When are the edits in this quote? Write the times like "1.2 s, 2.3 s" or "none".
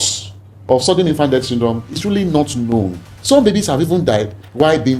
3.1 s